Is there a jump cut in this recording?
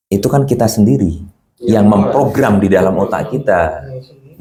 no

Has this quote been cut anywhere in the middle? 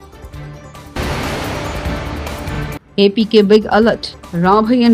yes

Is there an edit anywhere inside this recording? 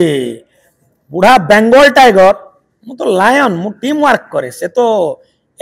no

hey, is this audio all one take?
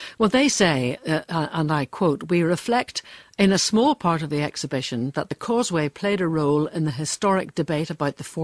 no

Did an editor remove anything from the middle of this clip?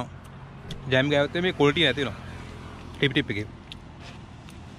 no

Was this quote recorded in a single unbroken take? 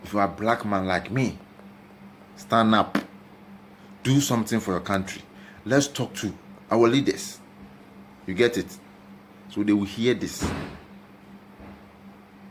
yes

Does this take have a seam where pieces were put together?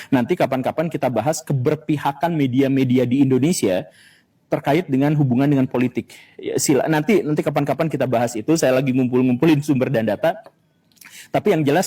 no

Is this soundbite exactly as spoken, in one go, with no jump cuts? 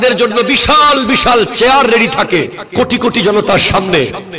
yes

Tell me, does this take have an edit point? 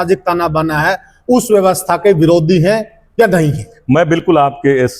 no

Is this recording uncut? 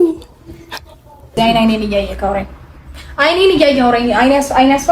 no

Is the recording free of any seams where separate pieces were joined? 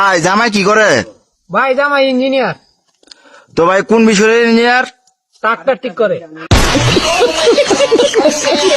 yes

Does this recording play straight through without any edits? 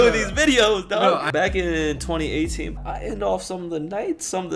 no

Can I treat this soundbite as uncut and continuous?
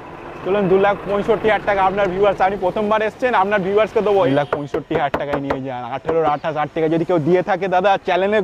no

